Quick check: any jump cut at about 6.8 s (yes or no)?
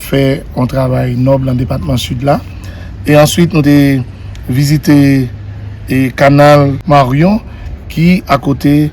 yes